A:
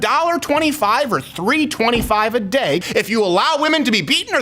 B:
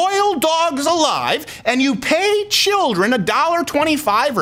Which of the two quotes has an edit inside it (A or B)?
A